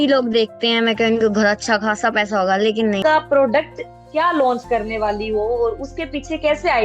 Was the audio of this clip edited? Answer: yes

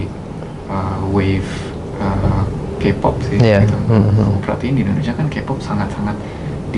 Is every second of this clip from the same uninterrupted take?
yes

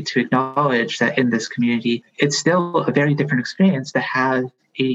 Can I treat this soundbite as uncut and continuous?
no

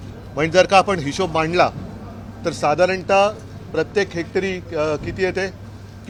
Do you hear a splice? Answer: no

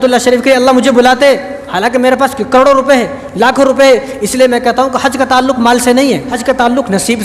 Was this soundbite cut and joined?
yes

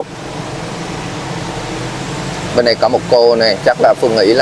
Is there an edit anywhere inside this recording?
no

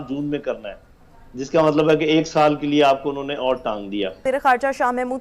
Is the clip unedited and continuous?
no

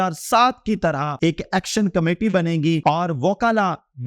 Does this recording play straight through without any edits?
no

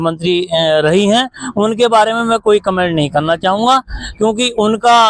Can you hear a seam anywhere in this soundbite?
no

